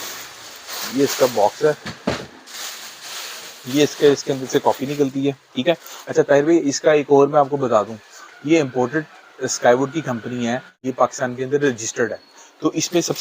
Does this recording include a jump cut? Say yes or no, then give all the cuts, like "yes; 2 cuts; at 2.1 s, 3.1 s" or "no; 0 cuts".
yes; 1 cut; at 10.8 s